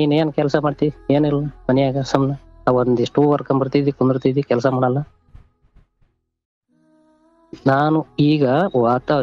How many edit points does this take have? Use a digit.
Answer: 0